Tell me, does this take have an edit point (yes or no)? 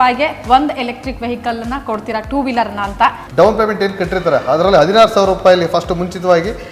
yes